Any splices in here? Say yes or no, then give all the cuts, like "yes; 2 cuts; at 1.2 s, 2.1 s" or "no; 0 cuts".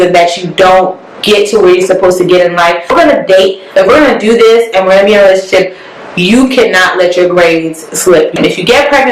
yes; 2 cuts; at 2.9 s, 8.3 s